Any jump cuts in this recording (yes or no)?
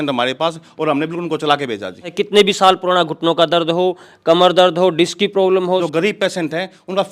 yes